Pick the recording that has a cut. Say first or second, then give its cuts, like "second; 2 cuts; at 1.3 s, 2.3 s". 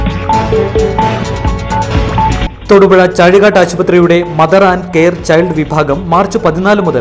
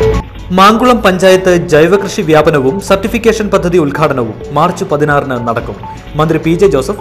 first; 1 cut; at 2.4 s